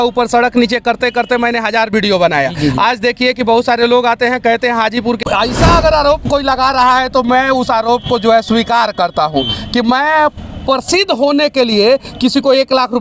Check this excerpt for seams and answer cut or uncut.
cut